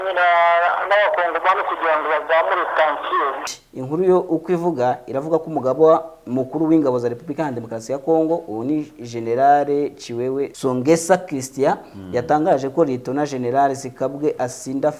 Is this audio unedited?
no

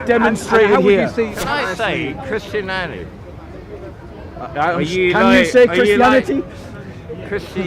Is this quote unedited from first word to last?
no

